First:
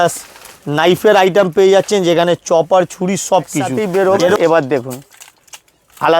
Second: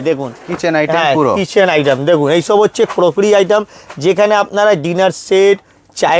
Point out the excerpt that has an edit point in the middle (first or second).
first